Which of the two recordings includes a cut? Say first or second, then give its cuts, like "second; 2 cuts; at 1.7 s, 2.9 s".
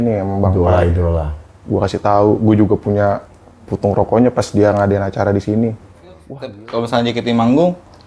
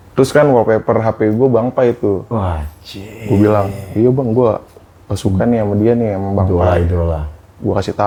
first; 1 cut; at 6.3 s